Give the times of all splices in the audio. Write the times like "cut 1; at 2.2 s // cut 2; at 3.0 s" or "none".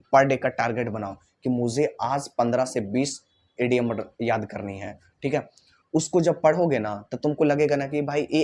none